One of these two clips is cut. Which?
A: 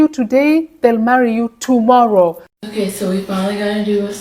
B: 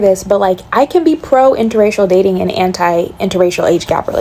A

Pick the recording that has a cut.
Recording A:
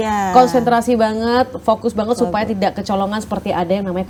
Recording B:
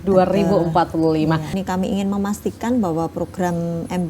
B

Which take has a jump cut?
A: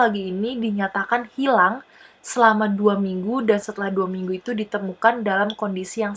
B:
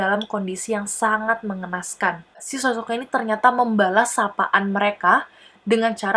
B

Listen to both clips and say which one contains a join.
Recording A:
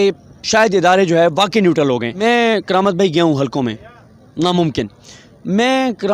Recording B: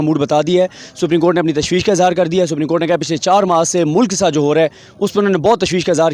A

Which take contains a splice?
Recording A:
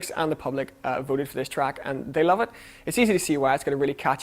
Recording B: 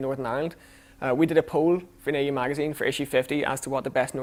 A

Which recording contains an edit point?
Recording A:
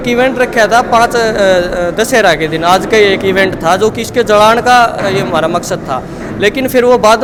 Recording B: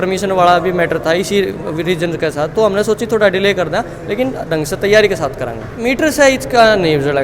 B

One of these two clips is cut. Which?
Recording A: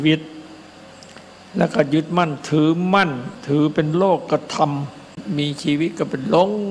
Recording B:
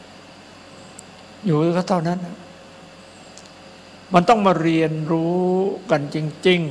A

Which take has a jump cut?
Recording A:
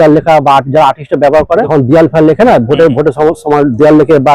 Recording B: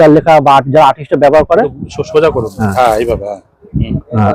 A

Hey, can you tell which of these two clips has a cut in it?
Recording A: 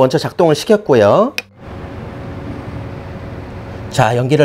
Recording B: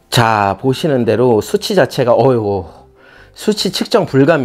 A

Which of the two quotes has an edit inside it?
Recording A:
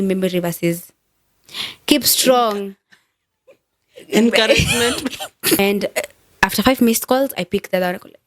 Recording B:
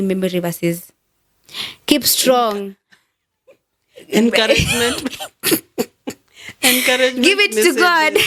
A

